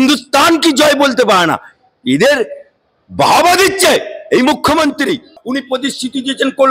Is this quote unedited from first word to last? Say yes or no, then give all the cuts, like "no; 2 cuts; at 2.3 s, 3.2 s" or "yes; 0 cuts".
no; 1 cut; at 5.4 s